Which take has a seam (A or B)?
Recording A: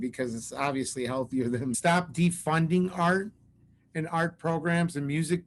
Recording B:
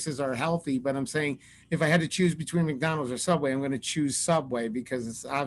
A